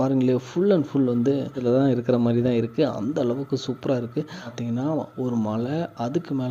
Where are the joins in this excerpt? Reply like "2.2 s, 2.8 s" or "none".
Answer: 1.6 s, 4.5 s